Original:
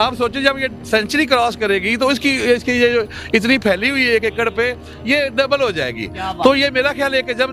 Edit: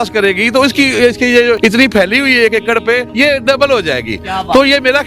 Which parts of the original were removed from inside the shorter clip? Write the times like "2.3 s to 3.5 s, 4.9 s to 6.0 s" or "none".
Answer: 3.0 s to 3.3 s, 4.8 s to 5.0 s